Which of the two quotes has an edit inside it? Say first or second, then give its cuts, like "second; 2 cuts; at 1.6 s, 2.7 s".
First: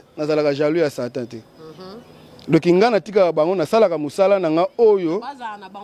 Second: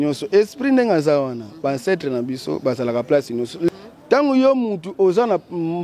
second; 1 cut; at 3.7 s